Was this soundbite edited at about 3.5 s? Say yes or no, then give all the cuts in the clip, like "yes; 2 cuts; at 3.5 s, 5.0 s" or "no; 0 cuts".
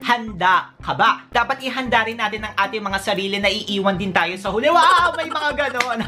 no; 1 cut; at 1.2 s